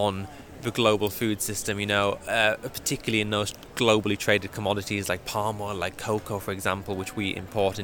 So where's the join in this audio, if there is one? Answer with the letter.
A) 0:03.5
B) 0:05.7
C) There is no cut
C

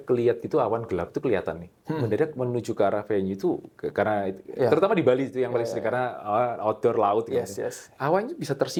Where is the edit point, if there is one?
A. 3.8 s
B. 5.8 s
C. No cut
C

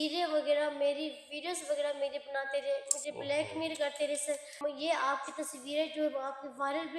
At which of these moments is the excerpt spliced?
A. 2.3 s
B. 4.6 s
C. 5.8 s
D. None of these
B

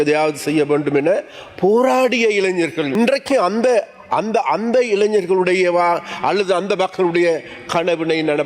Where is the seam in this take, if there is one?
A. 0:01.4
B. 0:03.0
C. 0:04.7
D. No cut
B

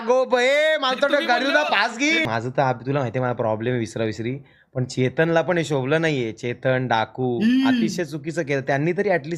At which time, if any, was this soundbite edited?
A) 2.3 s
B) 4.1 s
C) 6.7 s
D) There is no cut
A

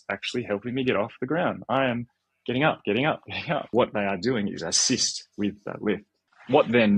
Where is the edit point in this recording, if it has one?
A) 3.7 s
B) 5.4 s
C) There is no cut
A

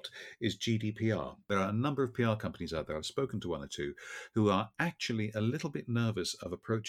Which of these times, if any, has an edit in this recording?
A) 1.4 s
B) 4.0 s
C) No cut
A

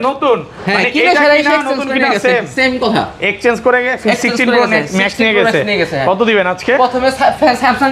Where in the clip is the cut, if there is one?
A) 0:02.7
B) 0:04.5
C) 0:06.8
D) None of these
D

